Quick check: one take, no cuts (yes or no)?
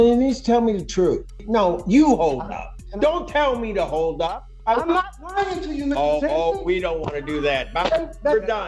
no